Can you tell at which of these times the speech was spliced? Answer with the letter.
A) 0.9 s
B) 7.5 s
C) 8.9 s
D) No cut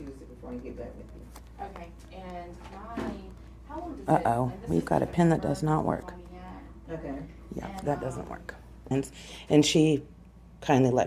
C